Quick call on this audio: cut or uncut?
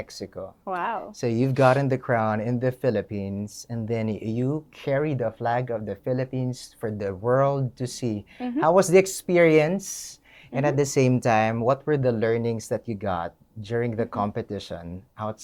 uncut